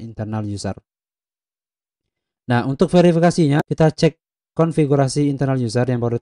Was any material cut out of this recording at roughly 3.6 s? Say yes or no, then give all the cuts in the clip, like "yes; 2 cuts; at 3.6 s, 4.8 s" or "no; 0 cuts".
yes; 1 cut; at 3.6 s